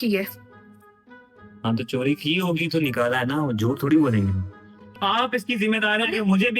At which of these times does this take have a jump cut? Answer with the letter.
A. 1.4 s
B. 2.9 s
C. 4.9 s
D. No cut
C